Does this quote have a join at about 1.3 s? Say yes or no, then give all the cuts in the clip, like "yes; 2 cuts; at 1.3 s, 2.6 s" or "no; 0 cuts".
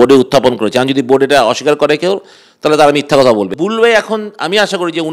no; 1 cut; at 3.5 s